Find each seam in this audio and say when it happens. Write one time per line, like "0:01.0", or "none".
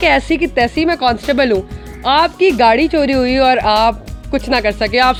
none